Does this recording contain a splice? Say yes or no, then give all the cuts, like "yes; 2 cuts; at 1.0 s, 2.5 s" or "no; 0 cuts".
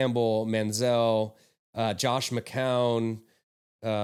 no; 0 cuts